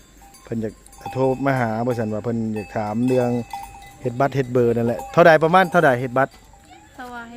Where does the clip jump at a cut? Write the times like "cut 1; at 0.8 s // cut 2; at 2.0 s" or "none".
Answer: none